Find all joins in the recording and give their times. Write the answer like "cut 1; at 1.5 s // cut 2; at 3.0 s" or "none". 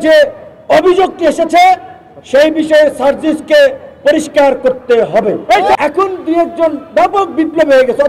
cut 1; at 5.8 s

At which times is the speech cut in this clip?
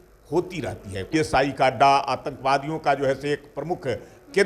cut 1; at 1.1 s

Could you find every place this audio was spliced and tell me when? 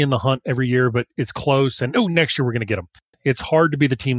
cut 1; at 3.0 s

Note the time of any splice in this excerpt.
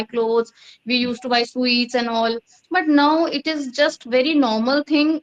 none

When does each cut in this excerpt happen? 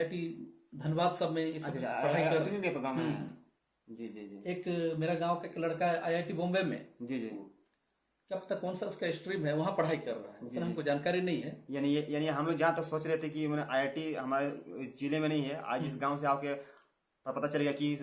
none

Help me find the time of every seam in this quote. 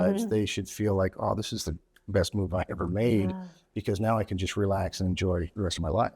none

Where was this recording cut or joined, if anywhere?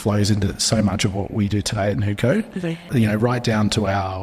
cut 1; at 2.9 s

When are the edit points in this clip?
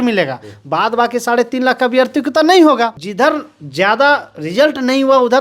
cut 1; at 3.0 s

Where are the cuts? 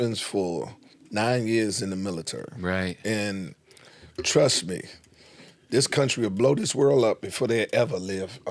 none

